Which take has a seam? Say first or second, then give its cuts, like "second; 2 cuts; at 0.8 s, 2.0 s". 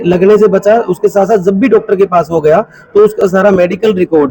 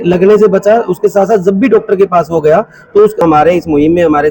second; 1 cut; at 3.2 s